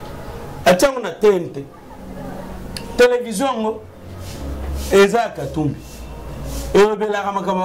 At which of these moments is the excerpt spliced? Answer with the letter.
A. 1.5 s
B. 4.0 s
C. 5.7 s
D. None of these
D